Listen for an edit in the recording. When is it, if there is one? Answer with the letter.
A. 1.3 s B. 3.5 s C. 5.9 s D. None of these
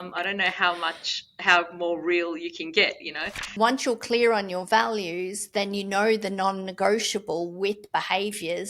B